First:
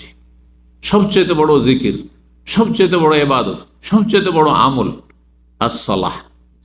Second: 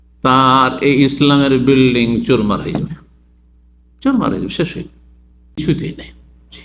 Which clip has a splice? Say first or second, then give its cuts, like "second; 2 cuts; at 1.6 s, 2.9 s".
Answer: second; 1 cut; at 5.6 s